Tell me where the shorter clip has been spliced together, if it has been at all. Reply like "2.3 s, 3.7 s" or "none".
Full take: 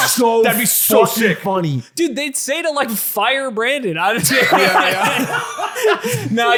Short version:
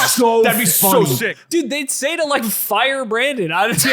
1.0 s